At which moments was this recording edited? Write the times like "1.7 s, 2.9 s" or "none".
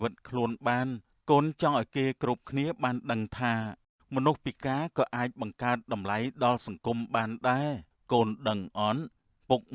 7.9 s

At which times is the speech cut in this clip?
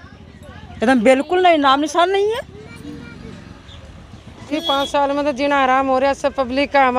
4.4 s

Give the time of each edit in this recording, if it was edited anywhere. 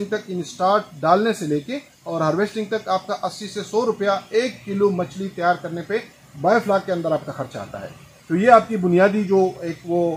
none

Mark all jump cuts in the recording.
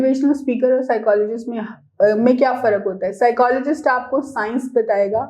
none

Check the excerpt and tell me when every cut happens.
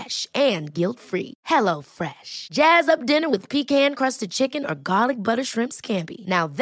none

